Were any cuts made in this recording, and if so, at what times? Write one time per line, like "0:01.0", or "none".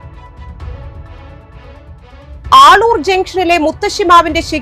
0:02.0